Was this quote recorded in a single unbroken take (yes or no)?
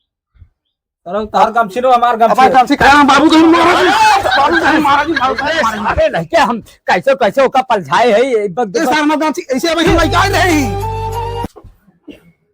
no